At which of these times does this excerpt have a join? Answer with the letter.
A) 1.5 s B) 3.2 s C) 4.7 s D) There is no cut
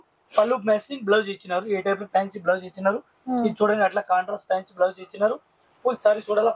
D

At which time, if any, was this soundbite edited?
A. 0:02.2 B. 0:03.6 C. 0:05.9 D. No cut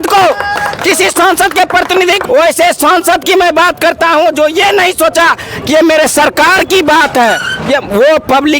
A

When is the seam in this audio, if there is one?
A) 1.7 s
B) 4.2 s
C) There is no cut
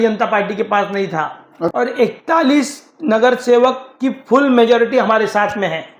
A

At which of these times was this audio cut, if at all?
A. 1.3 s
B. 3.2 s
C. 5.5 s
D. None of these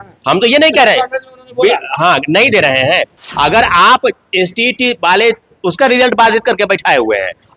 B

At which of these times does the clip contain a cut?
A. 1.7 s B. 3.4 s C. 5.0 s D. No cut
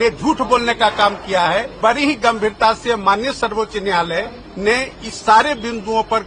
A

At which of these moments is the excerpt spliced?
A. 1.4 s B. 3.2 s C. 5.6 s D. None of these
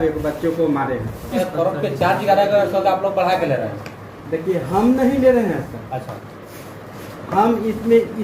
A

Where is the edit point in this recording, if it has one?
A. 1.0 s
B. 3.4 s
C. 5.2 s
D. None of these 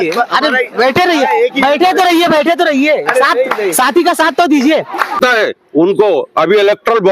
C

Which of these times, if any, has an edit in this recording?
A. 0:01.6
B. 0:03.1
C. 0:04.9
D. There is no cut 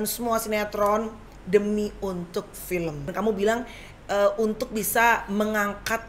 B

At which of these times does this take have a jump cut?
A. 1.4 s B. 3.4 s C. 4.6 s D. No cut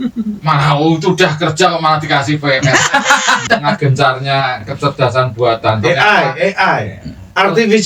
B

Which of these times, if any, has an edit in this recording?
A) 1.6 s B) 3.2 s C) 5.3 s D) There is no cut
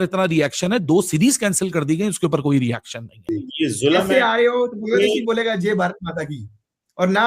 B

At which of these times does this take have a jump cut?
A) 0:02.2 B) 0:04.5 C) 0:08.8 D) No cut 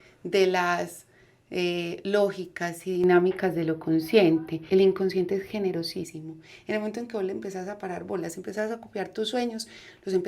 B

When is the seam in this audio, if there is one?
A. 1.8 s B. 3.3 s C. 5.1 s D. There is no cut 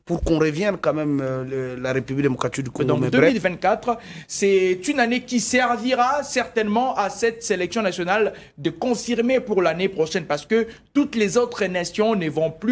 B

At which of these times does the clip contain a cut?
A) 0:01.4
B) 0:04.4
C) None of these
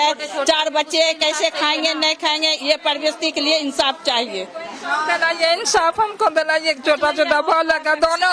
C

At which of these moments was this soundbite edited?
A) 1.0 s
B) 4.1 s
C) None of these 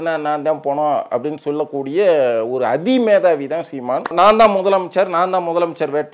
B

